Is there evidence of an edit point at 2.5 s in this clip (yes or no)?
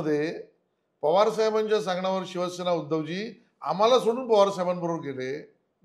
no